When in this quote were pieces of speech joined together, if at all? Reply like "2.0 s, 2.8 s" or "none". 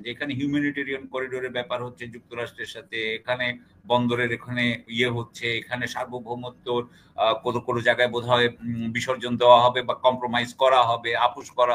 none